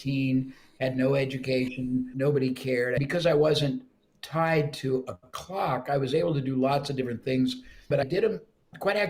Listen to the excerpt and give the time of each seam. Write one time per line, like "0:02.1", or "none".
0:02.1
0:03.0
0:08.0